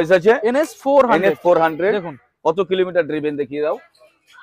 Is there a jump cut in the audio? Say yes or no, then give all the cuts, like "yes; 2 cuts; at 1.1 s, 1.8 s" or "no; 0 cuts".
no; 0 cuts